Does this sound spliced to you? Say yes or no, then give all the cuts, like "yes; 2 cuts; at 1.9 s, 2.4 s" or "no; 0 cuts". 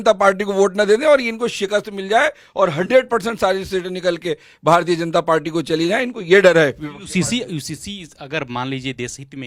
no; 0 cuts